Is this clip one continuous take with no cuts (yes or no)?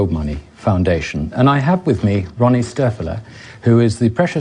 yes